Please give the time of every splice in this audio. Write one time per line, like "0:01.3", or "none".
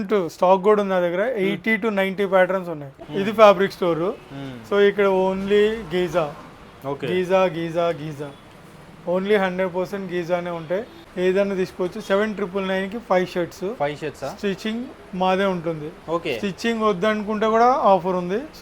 0:03.0
0:11.0